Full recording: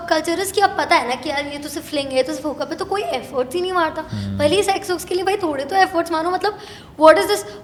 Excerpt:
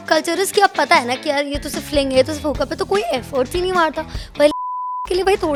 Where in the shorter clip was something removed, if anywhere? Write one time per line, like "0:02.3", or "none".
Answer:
none